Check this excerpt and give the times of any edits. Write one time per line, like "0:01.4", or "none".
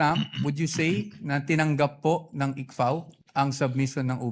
0:03.2